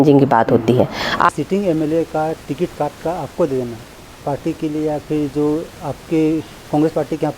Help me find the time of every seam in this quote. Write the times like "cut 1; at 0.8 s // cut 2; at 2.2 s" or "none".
cut 1; at 1.3 s